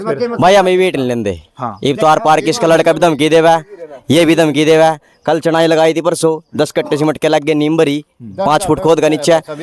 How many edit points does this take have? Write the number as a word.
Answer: zero